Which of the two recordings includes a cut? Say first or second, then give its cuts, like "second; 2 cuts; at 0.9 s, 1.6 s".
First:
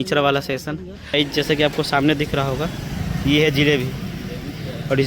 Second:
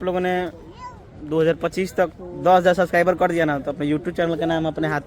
first; 1 cut; at 1.1 s